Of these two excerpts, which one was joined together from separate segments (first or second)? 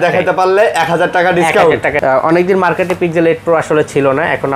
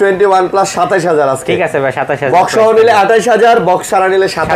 first